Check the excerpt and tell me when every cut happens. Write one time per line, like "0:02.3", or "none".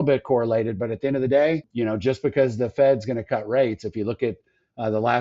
0:01.7